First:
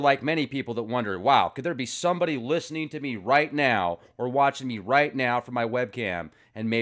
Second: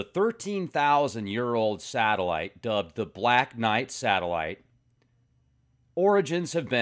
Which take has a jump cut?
first; 1 cut; at 3.2 s

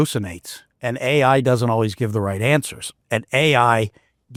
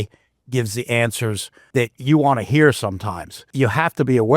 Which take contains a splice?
second; 2 cuts; at 1.5 s, 3.5 s

